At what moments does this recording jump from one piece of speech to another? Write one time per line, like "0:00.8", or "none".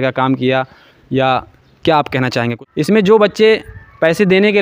0:02.6